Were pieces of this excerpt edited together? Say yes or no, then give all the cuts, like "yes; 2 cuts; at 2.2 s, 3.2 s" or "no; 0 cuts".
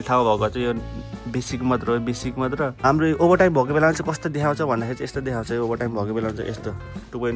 yes; 1 cut; at 2.8 s